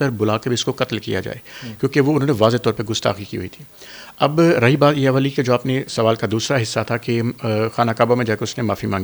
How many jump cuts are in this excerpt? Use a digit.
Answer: 0